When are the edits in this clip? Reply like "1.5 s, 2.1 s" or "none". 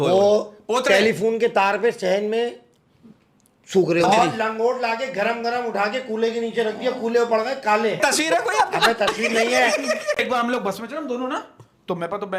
4.1 s, 8.0 s, 10.2 s